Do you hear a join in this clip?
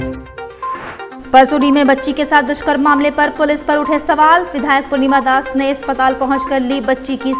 yes; 1 cut; at 1.2 s

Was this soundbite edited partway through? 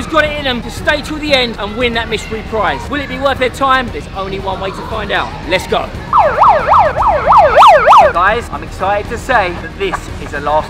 yes; 1 cut; at 8.1 s

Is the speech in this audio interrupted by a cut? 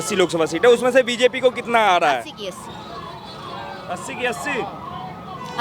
no; 0 cuts

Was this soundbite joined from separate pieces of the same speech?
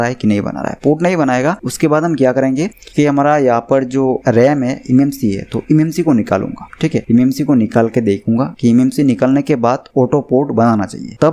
no; 0 cuts

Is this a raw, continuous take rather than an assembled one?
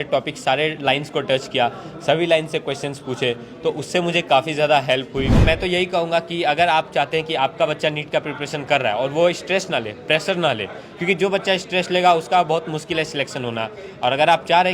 no; 1 cut; at 5.4 s

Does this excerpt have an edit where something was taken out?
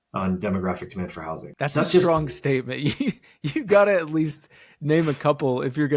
yes; 1 cut; at 1.5 s

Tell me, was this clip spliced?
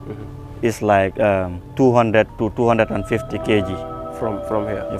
yes; 2 cuts; at 1.6 s, 4.0 s

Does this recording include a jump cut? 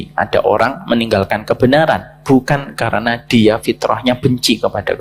no; 0 cuts

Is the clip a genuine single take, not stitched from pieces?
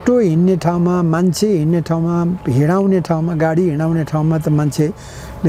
yes; 0 cuts

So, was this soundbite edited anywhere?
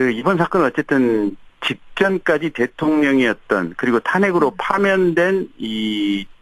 no; 0 cuts

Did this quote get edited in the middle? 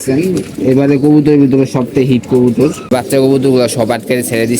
yes; 1 cut; at 2.9 s

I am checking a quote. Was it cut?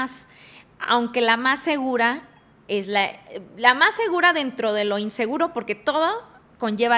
no; 0 cuts

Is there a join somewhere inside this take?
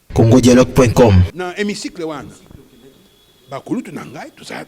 no; 0 cuts

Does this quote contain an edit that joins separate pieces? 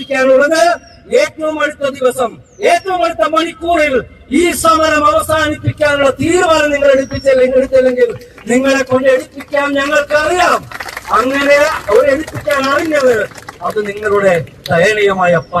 no; 0 cuts

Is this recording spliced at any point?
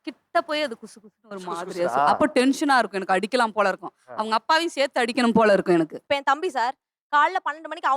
yes; 1 cut; at 6.0 s

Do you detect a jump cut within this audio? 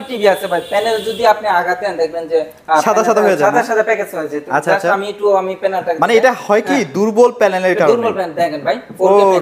no; 0 cuts

